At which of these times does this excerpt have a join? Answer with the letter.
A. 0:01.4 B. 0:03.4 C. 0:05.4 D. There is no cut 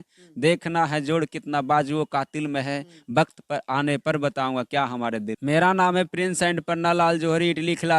C